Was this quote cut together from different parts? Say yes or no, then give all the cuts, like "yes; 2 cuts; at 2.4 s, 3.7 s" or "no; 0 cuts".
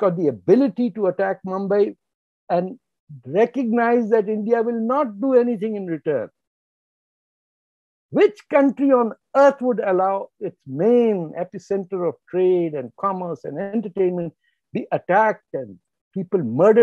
no; 0 cuts